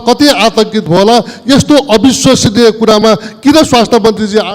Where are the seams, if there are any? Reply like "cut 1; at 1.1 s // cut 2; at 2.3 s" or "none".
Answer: none